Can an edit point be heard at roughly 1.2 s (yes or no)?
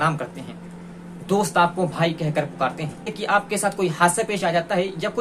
no